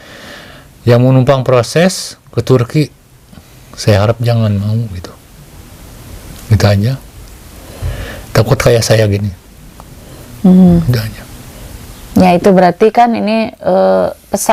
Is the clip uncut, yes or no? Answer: yes